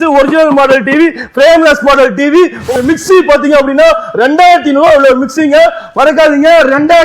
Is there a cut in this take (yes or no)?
yes